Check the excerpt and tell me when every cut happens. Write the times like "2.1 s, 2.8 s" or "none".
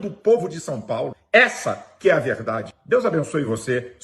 1.2 s, 2.7 s